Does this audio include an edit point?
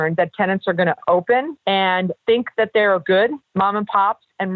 yes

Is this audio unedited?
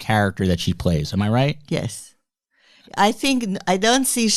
yes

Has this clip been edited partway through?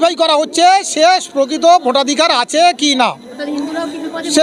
no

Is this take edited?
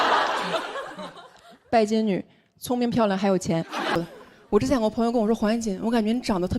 yes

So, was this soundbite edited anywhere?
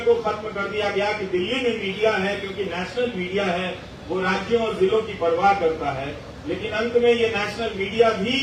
no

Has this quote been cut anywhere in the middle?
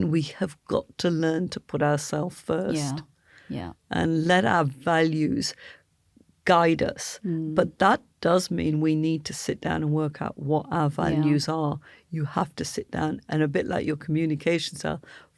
no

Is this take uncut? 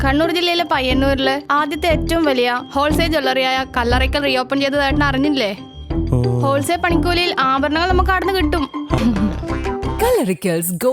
no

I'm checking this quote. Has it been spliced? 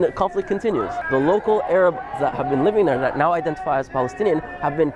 yes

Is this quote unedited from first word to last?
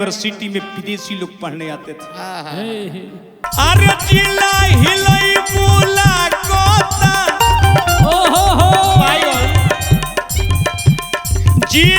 no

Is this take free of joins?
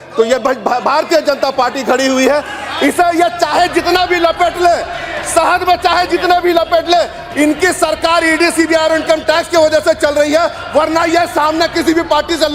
yes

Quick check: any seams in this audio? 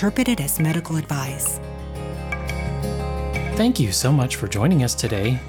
yes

